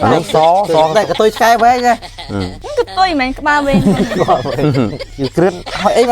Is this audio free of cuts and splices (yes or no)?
no